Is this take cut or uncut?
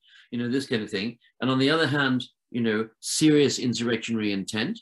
uncut